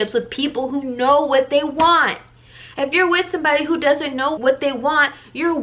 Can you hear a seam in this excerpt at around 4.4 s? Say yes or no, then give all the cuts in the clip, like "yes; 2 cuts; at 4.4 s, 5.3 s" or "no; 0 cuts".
yes; 1 cut; at 4.4 s